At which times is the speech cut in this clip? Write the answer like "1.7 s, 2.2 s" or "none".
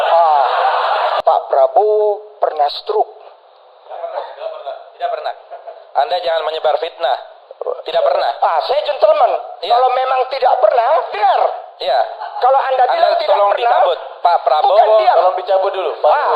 1.2 s